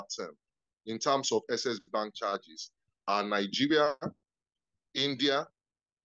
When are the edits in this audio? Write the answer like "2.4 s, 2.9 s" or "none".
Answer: none